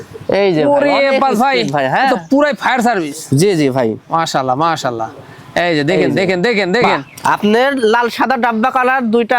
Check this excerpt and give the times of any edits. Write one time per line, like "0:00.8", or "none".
0:07.0

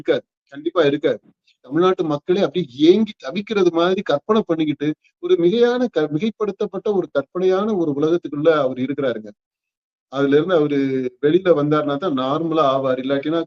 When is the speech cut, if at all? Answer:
0:01.6

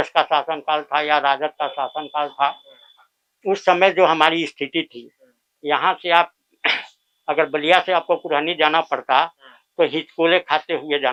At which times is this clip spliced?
none

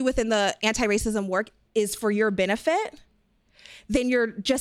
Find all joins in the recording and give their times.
none

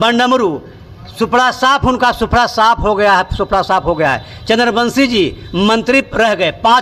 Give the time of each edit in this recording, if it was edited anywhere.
none

